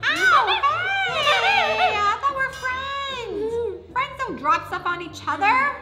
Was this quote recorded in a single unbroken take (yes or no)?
no